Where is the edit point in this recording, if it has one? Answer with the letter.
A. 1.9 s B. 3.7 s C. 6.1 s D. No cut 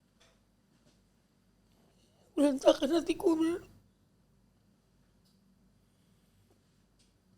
A